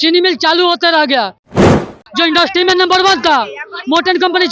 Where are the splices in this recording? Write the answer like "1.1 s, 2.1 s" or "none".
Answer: 1.9 s